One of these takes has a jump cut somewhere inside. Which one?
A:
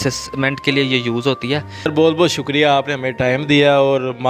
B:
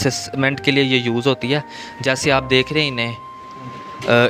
A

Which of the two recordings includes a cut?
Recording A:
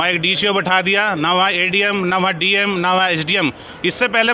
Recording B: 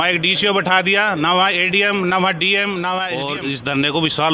B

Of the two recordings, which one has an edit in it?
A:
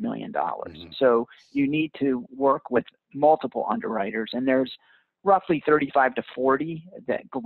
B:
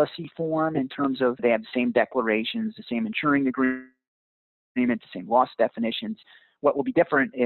B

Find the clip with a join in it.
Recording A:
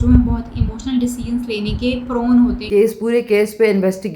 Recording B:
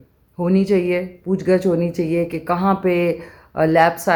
A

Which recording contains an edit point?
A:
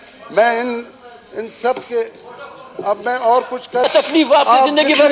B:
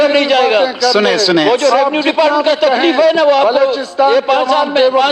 A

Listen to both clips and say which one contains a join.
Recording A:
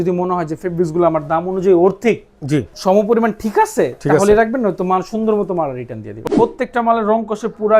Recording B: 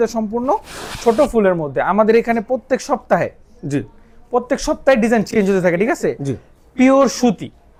A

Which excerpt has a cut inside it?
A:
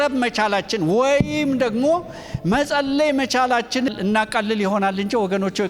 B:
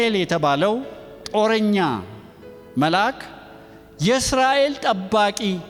A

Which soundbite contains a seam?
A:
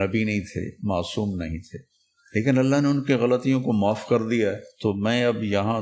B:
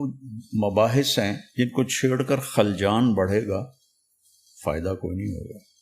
B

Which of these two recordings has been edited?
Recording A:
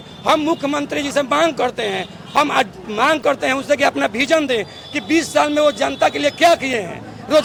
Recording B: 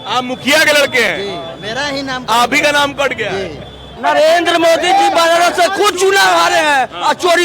B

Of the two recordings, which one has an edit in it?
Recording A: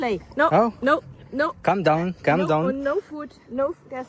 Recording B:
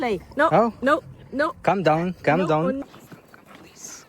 B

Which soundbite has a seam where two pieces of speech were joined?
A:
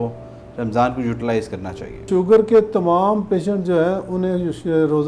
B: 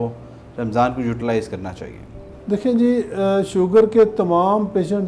A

